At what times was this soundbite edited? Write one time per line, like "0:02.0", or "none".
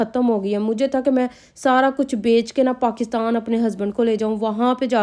none